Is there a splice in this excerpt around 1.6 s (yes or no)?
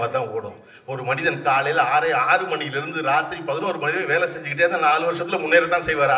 no